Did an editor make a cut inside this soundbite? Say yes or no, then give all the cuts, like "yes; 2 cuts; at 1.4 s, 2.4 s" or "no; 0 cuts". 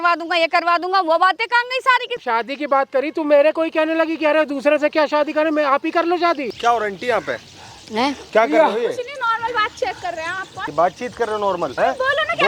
yes; 4 cuts; at 2.2 s, 6.4 s, 10.6 s, 11.7 s